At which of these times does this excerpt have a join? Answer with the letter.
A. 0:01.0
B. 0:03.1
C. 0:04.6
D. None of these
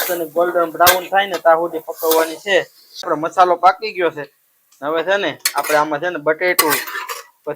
B